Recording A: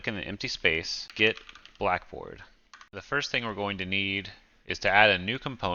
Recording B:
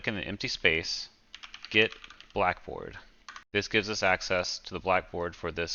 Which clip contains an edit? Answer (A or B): A